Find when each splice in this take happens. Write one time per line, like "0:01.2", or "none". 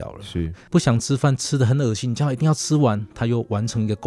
none